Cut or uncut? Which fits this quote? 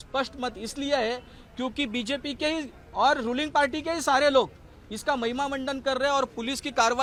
uncut